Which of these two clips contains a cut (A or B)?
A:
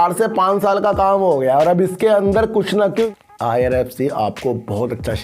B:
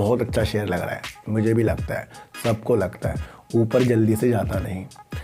A